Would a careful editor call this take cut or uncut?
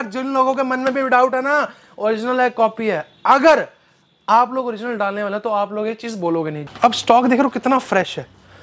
cut